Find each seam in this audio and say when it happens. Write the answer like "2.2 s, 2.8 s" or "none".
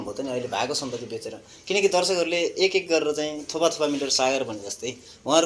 none